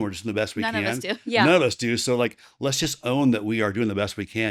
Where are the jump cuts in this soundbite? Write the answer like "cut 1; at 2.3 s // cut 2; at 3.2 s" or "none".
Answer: none

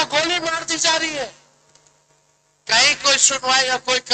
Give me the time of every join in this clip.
none

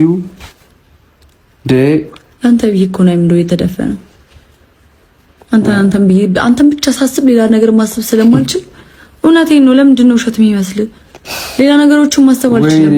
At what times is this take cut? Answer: none

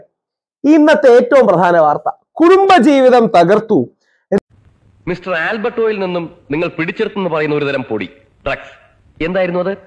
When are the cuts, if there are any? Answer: cut 1; at 4.4 s

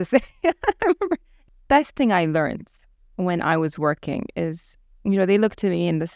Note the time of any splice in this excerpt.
cut 1; at 1.3 s

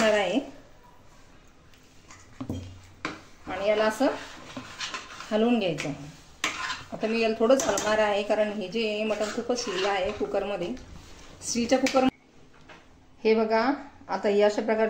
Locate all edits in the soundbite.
cut 1; at 12.1 s

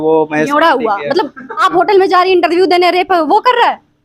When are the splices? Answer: cut 1; at 1.5 s

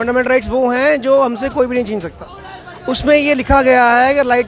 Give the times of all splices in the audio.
none

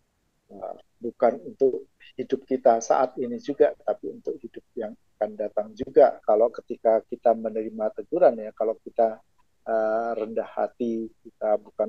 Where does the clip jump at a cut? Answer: cut 1; at 6.2 s

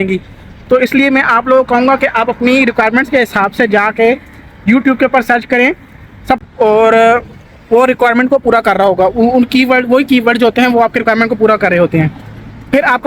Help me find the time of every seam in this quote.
cut 1; at 6.4 s

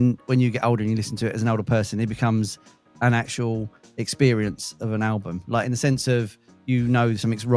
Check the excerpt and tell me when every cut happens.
none

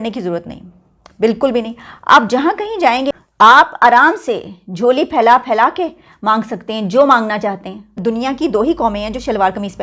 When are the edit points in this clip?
cut 1; at 3.2 s // cut 2; at 7.9 s

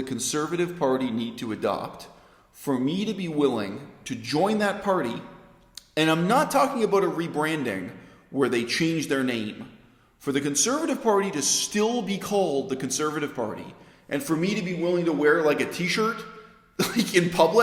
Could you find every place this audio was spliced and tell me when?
none

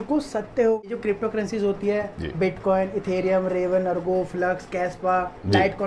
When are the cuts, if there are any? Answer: cut 1; at 0.9 s

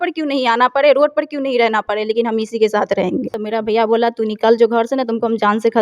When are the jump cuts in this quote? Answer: cut 1; at 3.4 s

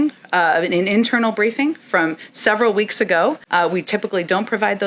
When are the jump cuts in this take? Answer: cut 1; at 3.4 s

